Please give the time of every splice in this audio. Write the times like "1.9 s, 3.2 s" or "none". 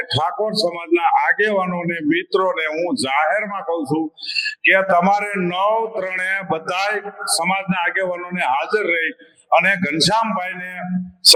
none